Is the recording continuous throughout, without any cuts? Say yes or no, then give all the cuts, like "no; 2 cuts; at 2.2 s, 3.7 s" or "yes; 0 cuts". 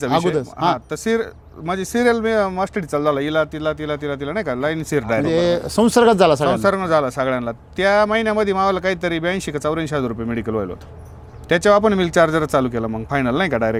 yes; 0 cuts